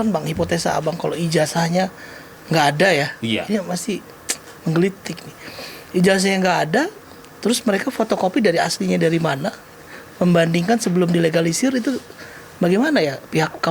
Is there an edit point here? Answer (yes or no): no